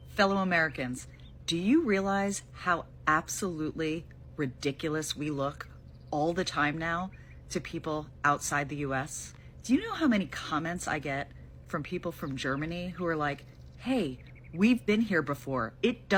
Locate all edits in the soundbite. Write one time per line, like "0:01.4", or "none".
none